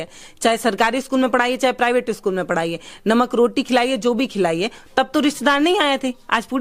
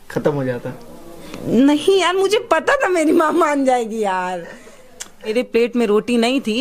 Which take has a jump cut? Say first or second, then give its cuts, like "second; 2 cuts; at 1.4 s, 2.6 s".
second; 1 cut; at 5.3 s